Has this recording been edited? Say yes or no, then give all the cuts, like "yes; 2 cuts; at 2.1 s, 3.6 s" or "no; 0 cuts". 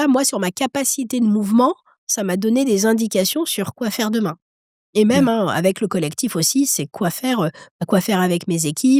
no; 0 cuts